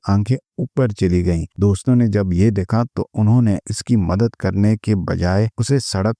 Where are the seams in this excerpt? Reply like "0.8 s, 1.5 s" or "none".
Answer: 1.5 s

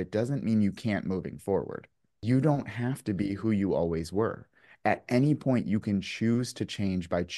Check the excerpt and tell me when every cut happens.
2.2 s

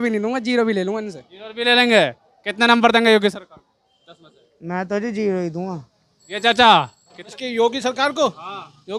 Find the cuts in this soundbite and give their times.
none

